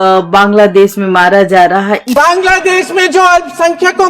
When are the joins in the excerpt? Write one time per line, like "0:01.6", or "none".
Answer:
0:02.1